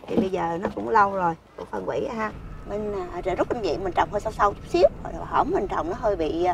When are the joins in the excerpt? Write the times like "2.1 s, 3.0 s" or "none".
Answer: 2.3 s